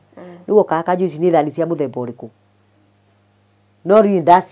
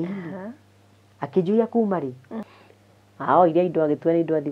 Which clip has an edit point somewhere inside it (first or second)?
second